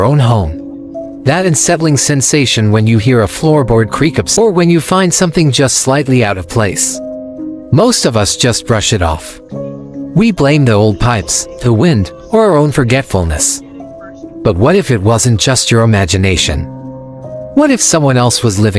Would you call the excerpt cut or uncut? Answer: cut